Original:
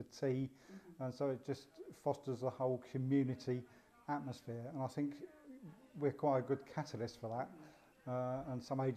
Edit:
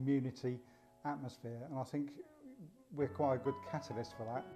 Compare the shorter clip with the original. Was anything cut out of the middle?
no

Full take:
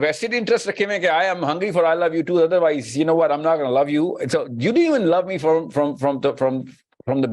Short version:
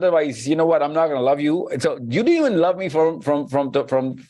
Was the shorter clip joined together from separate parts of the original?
no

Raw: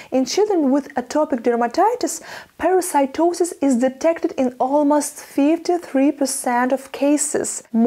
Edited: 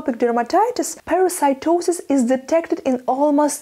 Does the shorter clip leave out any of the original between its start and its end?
yes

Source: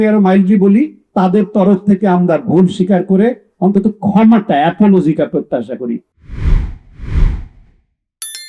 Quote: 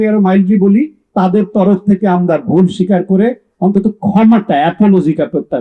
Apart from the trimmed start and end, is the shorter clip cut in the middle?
no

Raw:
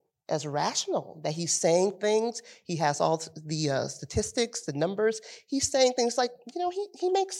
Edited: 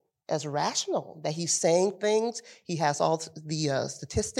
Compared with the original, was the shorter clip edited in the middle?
no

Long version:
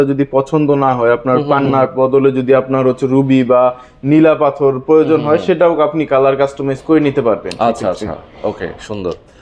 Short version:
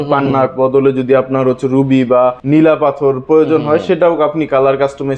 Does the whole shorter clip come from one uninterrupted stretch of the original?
no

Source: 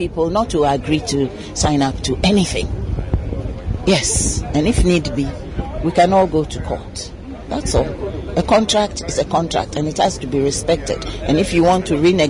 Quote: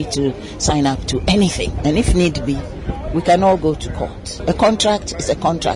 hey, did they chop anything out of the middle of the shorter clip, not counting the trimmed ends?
yes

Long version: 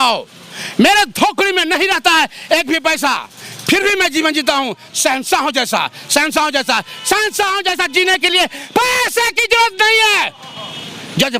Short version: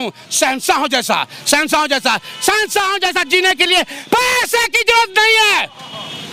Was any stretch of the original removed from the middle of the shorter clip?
no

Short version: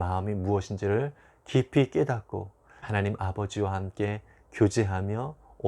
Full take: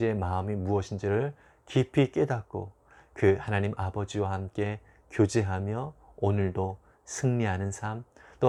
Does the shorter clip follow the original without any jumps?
no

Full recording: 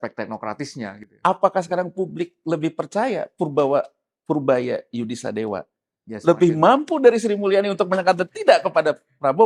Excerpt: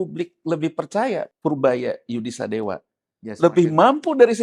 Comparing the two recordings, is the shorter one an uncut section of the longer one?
no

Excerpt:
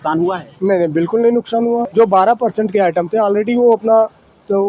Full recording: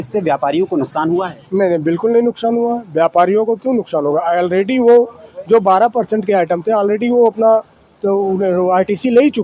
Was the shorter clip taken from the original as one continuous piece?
no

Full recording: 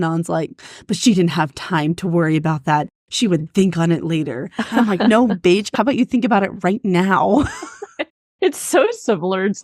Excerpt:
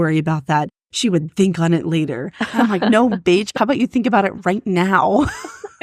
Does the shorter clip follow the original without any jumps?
yes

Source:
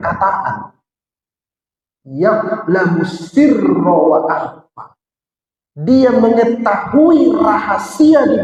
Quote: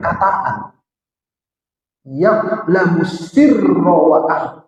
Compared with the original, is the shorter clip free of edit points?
yes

